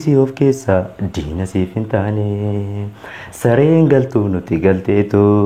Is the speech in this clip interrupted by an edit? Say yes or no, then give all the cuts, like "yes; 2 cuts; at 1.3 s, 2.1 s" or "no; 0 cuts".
no; 0 cuts